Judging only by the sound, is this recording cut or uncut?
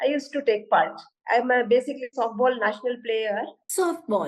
cut